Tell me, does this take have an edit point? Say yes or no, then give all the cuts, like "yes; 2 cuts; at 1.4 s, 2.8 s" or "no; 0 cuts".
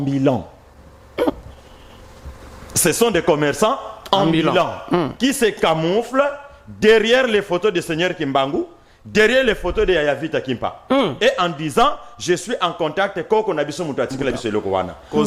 no; 0 cuts